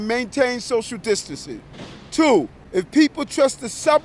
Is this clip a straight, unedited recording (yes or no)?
no